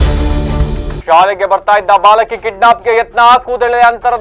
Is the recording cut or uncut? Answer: cut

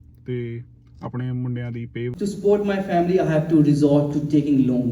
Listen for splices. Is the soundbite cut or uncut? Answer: cut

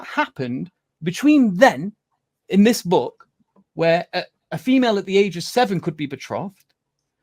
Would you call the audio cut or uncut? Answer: uncut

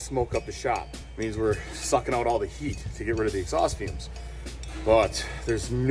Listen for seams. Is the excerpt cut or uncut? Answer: cut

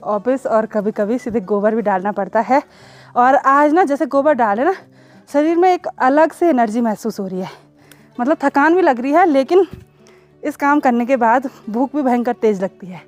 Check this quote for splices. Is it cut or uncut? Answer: uncut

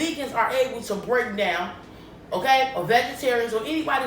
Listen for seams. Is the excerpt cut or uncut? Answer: uncut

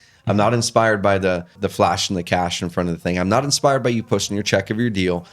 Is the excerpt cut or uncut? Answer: cut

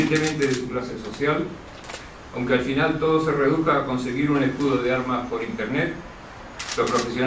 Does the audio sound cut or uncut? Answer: uncut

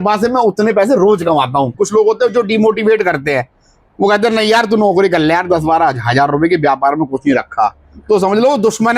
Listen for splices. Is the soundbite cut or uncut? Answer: cut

